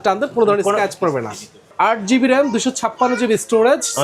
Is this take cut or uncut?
cut